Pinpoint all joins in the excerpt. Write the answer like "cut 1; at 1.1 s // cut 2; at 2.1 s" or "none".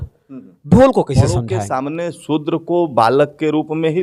cut 1; at 1.3 s